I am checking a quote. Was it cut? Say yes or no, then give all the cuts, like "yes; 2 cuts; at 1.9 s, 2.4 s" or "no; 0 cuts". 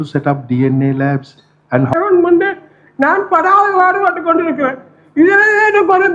yes; 1 cut; at 2.0 s